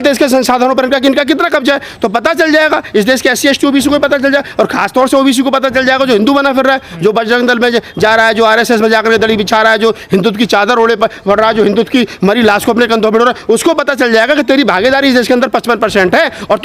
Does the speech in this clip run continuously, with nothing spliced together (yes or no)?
yes